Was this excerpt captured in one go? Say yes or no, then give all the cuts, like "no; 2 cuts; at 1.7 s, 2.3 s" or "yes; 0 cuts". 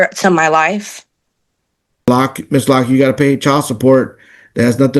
no; 1 cut; at 2.1 s